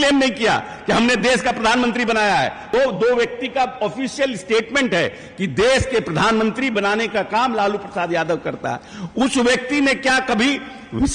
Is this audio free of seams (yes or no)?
no